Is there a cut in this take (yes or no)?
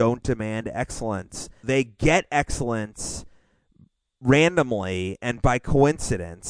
yes